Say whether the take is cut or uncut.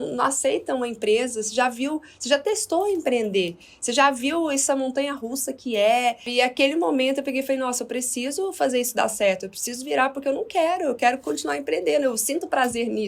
cut